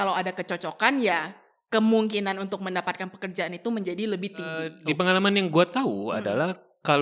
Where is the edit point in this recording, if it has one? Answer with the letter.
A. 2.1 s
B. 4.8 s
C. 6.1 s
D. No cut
B